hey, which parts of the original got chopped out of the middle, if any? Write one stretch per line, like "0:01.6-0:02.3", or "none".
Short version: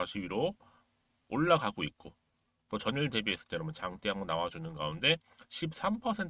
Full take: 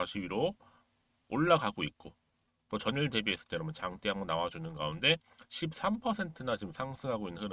none